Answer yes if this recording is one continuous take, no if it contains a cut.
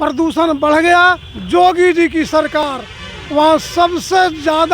no